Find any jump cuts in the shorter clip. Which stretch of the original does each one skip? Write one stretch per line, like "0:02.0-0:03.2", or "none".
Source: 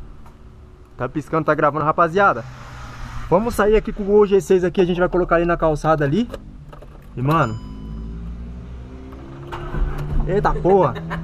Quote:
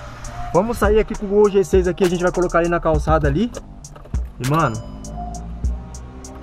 none